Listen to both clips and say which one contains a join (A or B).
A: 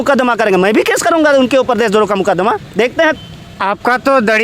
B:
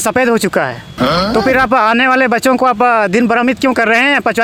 A